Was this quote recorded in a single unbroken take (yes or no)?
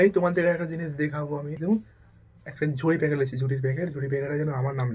no